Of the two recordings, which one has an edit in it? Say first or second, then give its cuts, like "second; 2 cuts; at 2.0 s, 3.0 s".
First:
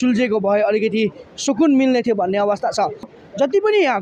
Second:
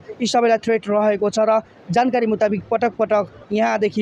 first; 1 cut; at 3.1 s